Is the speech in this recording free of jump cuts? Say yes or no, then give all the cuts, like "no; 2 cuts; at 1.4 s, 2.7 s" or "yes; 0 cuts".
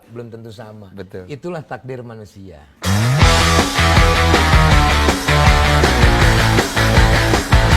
no; 1 cut; at 2.8 s